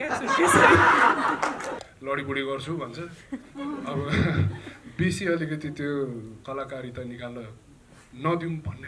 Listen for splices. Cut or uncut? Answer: cut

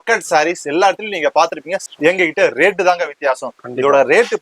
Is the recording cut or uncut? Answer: cut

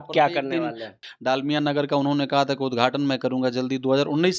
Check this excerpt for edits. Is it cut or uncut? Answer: cut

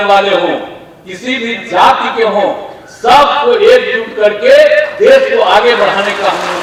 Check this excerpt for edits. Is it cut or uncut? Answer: uncut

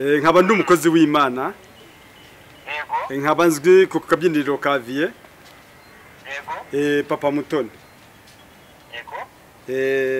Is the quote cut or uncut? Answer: cut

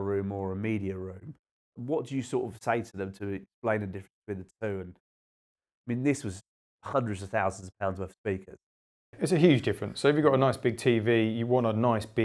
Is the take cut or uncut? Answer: cut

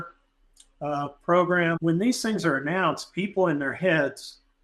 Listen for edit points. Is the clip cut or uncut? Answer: cut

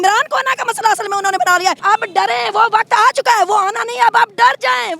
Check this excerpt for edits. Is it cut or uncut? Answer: cut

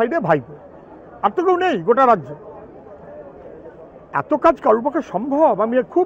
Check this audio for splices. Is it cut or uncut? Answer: uncut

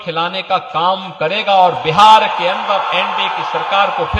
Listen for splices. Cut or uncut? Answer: uncut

